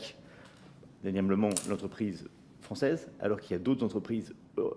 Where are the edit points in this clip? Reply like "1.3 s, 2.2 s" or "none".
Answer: none